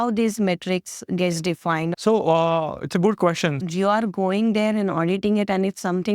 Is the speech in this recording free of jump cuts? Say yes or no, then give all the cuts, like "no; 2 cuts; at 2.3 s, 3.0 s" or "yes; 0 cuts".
no; 2 cuts; at 1.9 s, 3.6 s